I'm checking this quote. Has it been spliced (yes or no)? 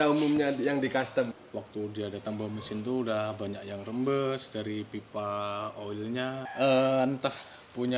yes